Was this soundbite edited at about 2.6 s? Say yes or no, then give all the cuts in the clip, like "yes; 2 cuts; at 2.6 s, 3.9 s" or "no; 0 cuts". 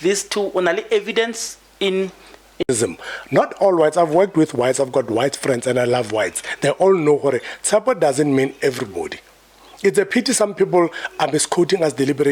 yes; 1 cut; at 2.6 s